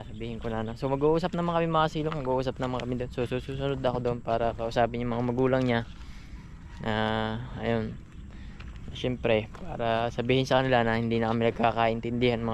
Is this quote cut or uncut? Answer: uncut